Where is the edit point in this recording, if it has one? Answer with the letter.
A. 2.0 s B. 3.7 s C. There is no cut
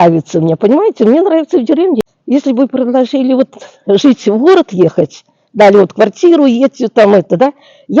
A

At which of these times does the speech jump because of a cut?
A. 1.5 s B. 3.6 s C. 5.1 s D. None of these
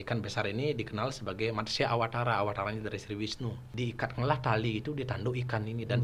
B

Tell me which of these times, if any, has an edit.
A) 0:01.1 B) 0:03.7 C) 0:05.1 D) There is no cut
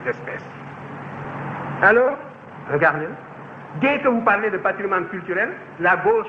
A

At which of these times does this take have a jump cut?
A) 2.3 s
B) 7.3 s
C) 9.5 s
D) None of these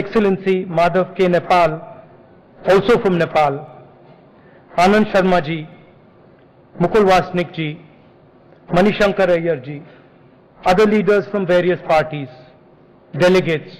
C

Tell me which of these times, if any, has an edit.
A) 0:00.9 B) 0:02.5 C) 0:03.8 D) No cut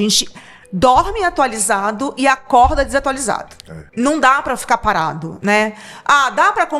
C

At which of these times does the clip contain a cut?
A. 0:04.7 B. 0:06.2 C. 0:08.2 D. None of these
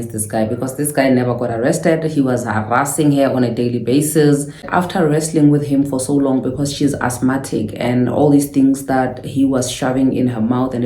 A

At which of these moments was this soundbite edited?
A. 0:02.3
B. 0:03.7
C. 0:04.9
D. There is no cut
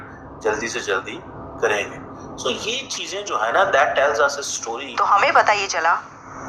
C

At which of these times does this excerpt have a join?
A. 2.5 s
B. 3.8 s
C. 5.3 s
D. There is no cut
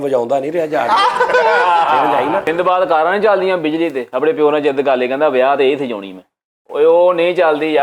A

